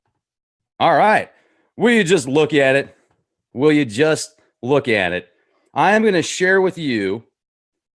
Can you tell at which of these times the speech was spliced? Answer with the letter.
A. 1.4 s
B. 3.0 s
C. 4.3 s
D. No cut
D